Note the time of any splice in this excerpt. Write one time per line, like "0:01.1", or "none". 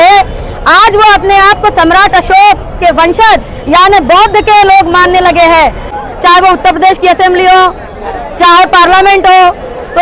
0:06.0